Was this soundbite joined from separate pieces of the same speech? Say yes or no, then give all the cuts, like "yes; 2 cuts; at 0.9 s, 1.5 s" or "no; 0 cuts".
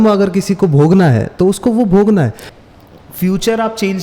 yes; 1 cut; at 2.4 s